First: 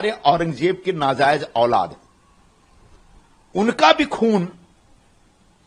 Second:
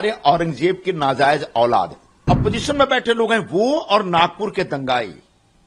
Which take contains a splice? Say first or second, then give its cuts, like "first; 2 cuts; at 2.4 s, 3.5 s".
second; 1 cut; at 2.3 s